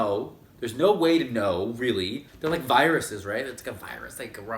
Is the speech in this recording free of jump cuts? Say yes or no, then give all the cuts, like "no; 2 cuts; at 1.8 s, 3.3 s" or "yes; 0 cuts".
no; 1 cut; at 2.2 s